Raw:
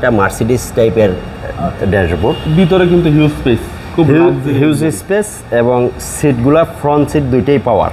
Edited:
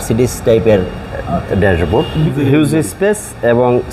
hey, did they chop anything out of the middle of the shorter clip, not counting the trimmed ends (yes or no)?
yes